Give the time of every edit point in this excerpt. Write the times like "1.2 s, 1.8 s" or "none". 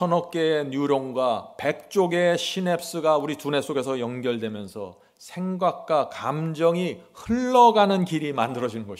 none